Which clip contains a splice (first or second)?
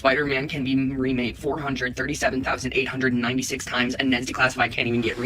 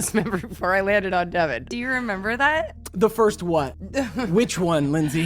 second